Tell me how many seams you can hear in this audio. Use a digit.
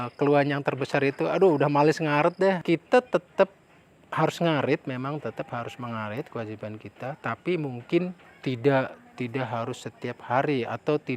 2